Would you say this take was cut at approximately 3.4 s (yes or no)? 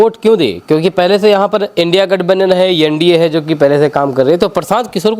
no